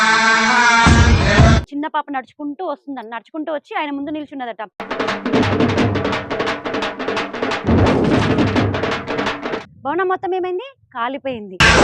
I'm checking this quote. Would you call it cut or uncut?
cut